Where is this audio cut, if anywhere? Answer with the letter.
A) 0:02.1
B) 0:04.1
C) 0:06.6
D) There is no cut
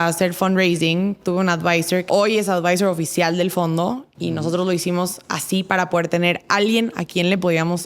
A